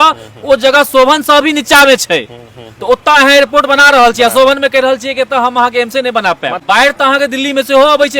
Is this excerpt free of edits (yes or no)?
no